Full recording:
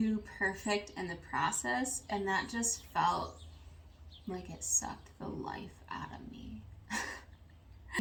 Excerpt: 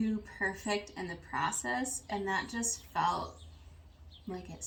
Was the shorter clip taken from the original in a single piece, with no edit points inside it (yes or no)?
yes